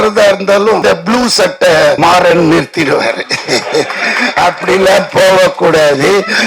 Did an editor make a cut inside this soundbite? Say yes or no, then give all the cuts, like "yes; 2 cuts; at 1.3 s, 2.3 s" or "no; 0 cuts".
yes; 2 cuts; at 0.8 s, 2.0 s